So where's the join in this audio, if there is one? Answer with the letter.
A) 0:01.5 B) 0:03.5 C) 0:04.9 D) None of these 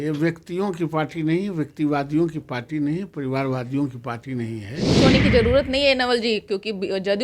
C